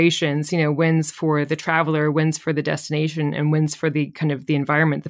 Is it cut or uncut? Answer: uncut